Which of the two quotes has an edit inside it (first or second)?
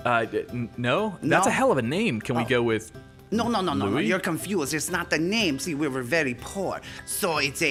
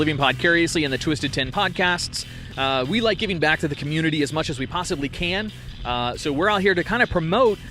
second